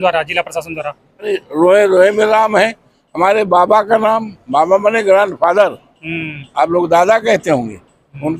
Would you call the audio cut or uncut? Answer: cut